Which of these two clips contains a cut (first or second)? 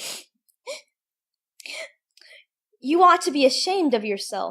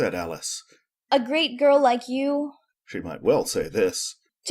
second